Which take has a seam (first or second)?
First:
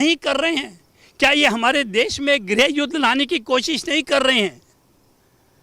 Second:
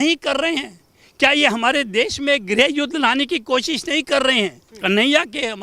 second